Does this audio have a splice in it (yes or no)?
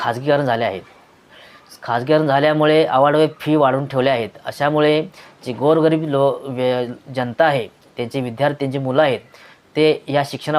no